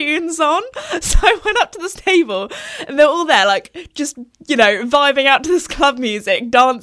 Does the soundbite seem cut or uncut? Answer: uncut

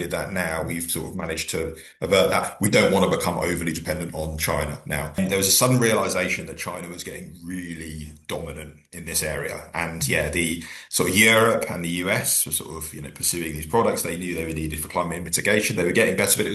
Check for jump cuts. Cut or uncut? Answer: cut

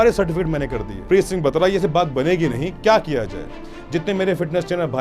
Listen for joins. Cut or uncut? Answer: cut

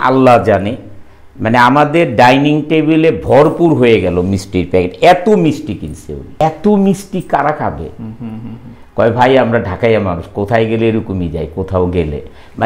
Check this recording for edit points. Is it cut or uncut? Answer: cut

